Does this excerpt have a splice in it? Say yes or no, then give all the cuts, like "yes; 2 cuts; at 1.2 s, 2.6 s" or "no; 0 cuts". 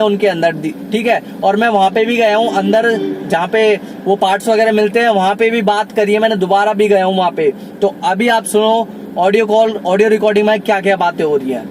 no; 0 cuts